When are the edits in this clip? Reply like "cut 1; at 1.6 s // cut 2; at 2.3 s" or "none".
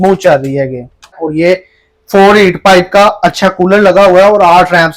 cut 1; at 1.1 s

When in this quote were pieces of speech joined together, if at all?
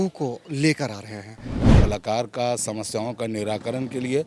cut 1; at 1.7 s

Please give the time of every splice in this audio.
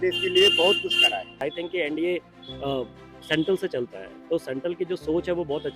cut 1; at 1.4 s

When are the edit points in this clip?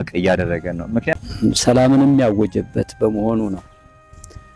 cut 1; at 1.1 s

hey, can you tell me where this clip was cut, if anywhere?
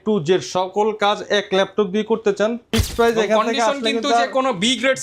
cut 1; at 2.9 s

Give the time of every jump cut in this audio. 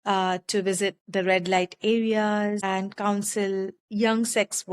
cut 1; at 2.6 s // cut 2; at 3.8 s

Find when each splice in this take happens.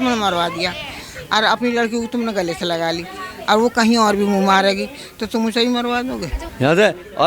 cut 1; at 6.4 s

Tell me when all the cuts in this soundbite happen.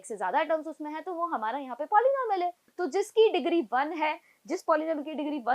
cut 1; at 2.6 s

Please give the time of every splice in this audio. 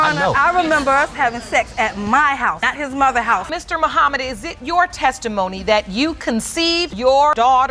none

